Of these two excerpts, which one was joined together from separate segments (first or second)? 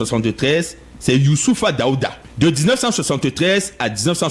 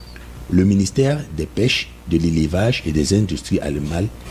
first